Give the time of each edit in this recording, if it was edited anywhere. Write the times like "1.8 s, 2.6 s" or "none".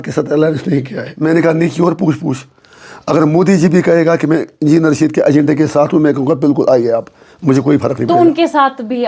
1.0 s